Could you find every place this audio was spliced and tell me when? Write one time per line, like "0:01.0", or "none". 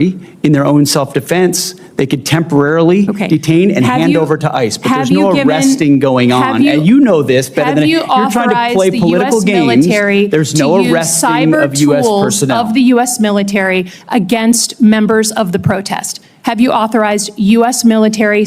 none

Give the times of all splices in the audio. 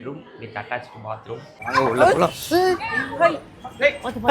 0:01.6

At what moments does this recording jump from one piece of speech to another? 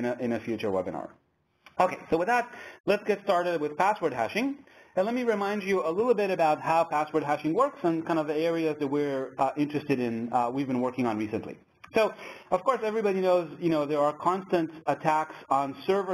0:07.2

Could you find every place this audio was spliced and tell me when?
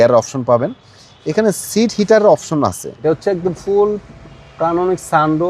0:02.9

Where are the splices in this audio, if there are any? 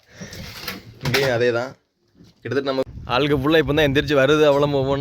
0:02.8

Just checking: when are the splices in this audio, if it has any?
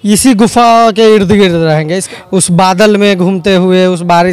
0:02.0

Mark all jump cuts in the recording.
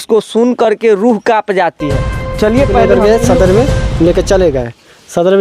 0:02.9

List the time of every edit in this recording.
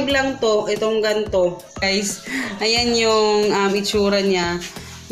0:01.8

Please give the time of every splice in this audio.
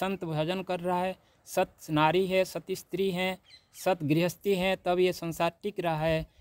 none

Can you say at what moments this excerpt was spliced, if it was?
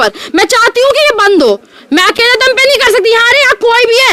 none

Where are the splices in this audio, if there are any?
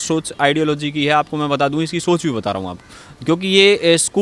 none

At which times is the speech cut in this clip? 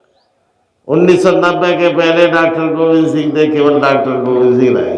none

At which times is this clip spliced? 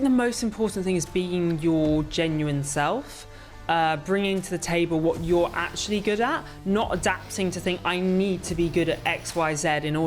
none

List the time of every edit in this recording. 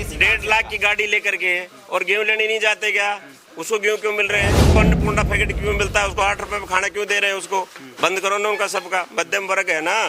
none

